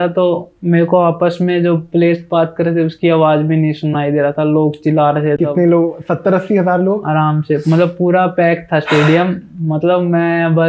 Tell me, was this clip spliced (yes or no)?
no